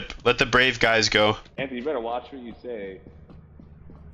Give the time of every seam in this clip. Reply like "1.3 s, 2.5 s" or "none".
1.5 s